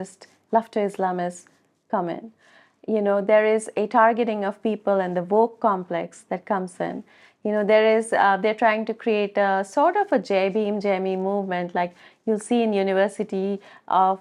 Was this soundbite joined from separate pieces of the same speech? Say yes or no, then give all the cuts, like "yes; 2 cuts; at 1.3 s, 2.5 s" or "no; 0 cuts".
no; 0 cuts